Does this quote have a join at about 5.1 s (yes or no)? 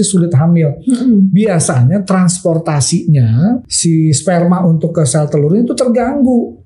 no